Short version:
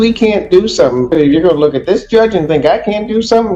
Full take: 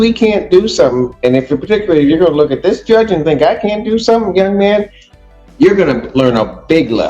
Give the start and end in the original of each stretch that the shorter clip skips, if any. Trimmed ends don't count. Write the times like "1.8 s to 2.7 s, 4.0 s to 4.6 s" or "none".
1.1 s to 1.9 s